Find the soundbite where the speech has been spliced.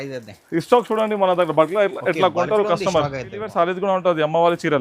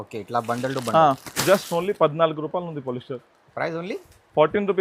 first; 1 cut; at 3.5 s

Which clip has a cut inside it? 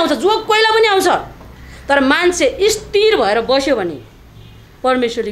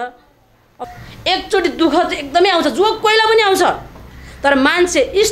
second; 1 cut; at 0.9 s

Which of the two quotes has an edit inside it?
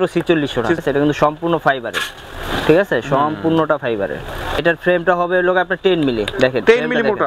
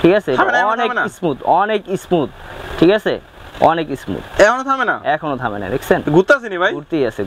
first; 2 cuts; at 0.8 s, 4.6 s

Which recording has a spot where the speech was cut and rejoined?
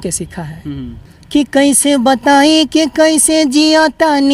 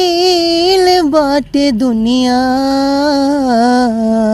first; 1 cut; at 1.0 s

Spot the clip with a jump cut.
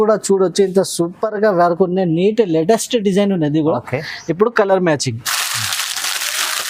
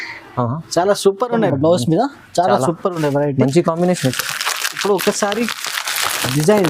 second; 1 cut; at 1.5 s

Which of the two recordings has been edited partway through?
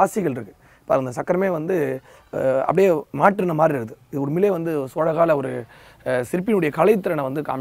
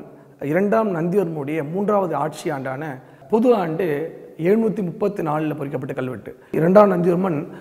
second; 2 cuts; at 3.1 s, 6.5 s

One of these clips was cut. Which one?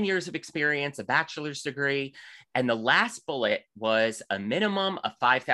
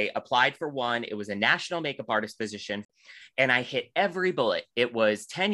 second; 1 cut; at 2.9 s

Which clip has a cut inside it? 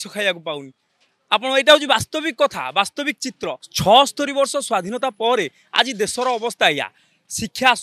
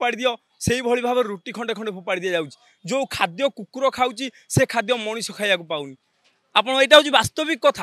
first; 1 cut; at 3.7 s

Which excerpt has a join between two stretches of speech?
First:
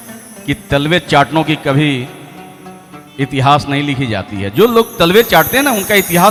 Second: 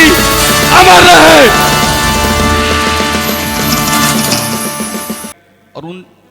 second; 1 cut; at 5.3 s

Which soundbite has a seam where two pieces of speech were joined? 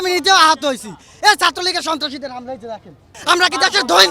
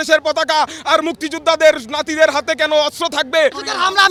first; 1 cut; at 3.1 s

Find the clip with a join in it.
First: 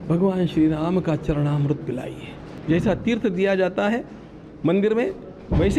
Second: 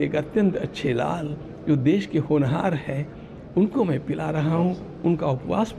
first; 1 cut; at 2.5 s

